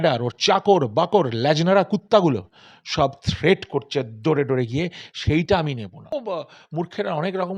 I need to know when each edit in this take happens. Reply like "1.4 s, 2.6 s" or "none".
6.2 s